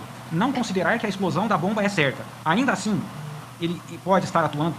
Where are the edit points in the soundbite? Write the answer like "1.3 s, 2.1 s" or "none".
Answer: 2.3 s